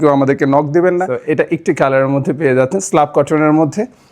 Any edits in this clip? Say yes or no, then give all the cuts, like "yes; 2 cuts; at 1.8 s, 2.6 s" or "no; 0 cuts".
yes; 1 cut; at 1.1 s